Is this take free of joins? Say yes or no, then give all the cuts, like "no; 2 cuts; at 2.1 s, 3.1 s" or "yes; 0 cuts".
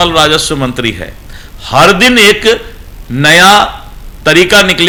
yes; 0 cuts